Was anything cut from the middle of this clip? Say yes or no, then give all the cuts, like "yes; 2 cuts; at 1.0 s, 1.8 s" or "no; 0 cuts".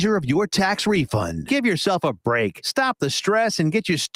no; 0 cuts